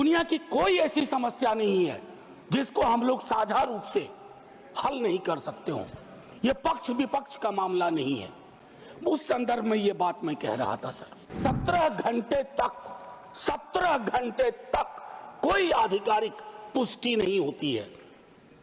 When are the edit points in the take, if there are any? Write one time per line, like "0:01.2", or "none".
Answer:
0:11.3